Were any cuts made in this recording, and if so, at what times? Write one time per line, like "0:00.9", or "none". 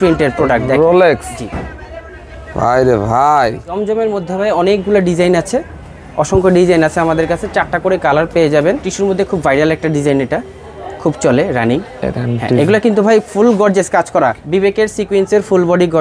0:03.7
0:08.9
0:14.4

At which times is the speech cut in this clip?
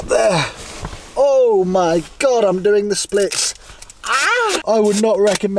0:04.6

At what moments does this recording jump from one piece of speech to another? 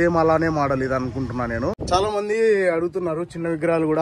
0:01.8

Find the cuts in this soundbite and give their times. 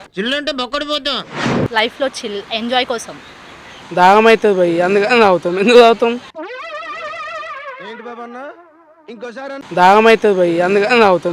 0:03.9
0:06.1

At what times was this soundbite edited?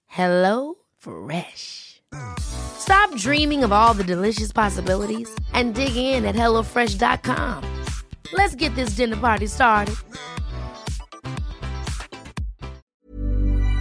0:12.9

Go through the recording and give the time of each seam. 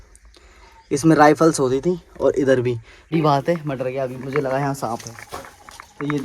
0:03.0

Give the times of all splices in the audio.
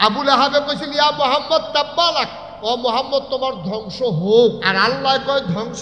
0:02.4
0:04.7

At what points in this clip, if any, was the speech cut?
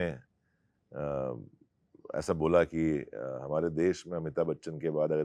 none

